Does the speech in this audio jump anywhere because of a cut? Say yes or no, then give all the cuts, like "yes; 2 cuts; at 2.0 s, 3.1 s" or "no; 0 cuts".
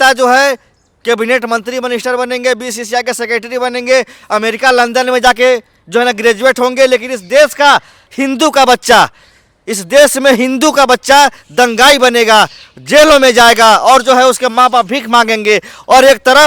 no; 0 cuts